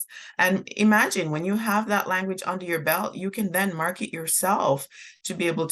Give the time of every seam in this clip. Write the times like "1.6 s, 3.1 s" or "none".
none